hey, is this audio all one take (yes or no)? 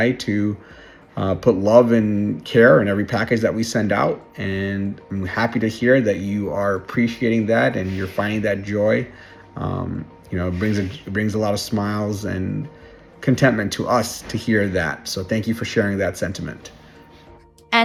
yes